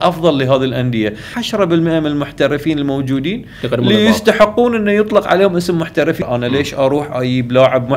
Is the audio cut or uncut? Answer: cut